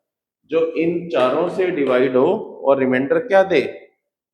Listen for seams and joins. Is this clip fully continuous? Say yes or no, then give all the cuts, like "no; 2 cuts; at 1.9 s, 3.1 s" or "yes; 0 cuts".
yes; 0 cuts